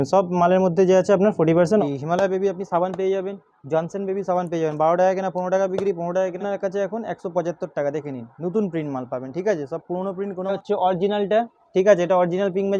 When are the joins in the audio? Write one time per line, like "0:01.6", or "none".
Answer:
0:01.8
0:06.4
0:10.5